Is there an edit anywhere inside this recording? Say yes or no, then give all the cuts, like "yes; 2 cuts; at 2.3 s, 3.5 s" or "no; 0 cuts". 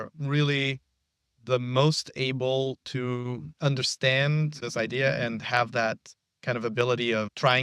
yes; 1 cut; at 4.6 s